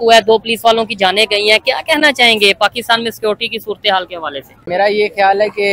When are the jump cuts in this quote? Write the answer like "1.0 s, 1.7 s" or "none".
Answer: none